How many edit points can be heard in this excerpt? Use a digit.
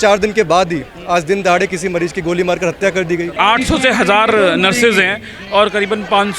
1